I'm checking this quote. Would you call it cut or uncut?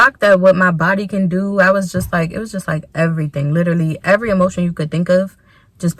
uncut